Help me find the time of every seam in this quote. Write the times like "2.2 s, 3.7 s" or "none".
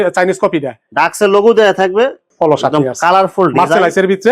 2.2 s